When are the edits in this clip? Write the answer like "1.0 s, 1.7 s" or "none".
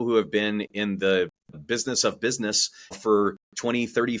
1.6 s, 3.0 s